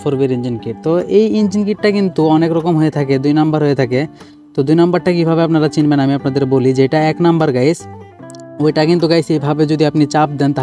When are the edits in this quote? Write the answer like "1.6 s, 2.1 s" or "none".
none